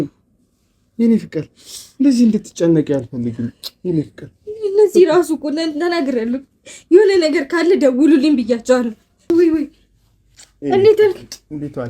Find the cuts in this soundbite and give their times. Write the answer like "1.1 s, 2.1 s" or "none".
9.3 s